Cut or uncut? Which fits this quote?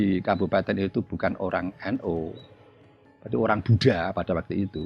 uncut